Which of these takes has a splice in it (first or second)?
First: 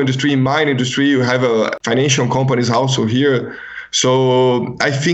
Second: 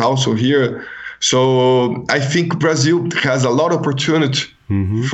first